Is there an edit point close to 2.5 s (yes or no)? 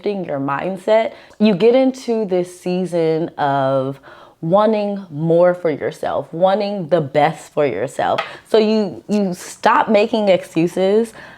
no